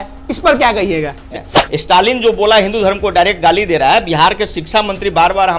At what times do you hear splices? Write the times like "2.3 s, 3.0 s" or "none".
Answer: 1.4 s